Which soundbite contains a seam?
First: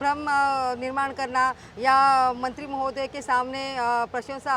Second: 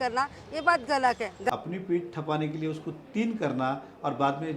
second; 1 cut; at 1.5 s

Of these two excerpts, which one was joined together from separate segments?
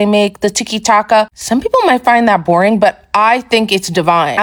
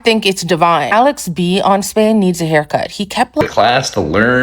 second; 1 cut; at 3.4 s

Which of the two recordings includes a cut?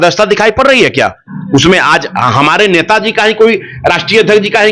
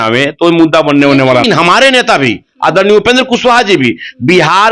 second; 1 cut; at 1.4 s

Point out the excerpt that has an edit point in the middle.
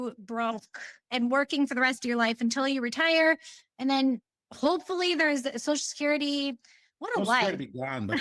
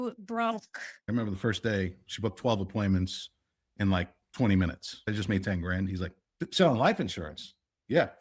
second; 2 cuts; at 1.0 s, 5.1 s

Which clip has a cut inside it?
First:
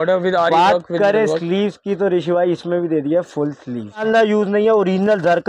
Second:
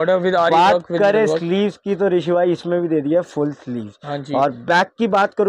first; 1 cut; at 4.0 s

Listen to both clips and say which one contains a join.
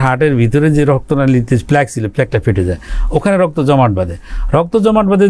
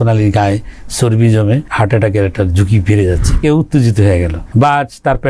second; 3 cuts; at 1.7 s, 3.4 s, 4.4 s

